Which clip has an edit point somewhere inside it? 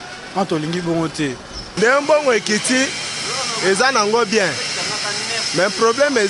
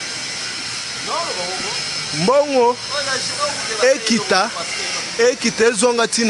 first; 1 cut; at 1.6 s

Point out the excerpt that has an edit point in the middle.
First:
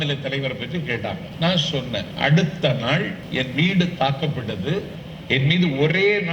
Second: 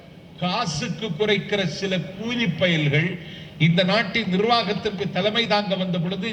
first; 4 cuts; at 1.3 s, 2.1 s, 3.2 s, 5.0 s

